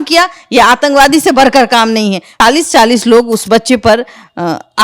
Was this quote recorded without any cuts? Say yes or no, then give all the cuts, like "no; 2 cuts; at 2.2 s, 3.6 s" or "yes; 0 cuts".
no; 1 cut; at 2.4 s